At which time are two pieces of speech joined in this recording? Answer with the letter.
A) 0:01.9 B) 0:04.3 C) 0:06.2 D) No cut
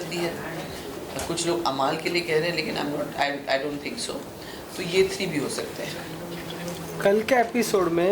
D